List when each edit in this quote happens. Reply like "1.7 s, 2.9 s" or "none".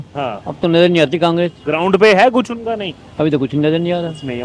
none